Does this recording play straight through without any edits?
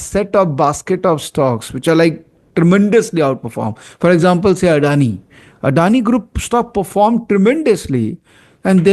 yes; 0 cuts

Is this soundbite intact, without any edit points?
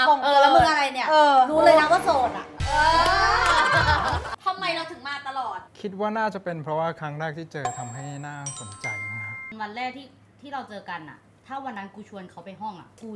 no; 2 cuts; at 4.4 s, 9.5 s

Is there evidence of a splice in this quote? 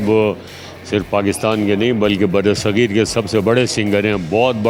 no; 0 cuts

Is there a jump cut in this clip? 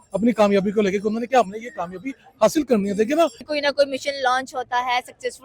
yes; 1 cut; at 3.4 s

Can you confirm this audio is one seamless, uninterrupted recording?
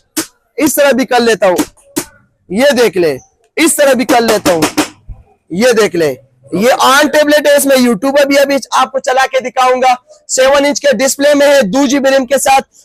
yes; 0 cuts

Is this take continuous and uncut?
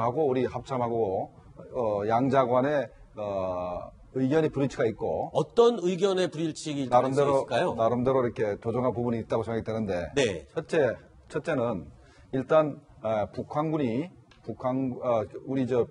no; 1 cut; at 4.7 s

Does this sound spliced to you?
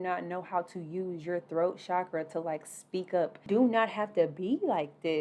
yes; 1 cut; at 3.5 s

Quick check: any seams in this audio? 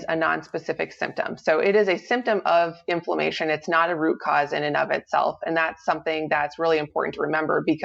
no; 0 cuts

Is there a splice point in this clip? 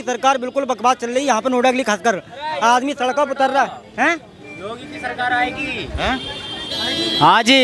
no; 0 cuts

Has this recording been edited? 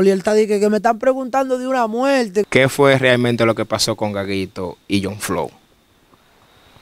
yes; 1 cut; at 2.5 s

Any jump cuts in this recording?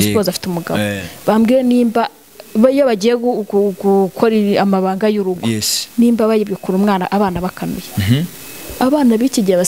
no; 0 cuts

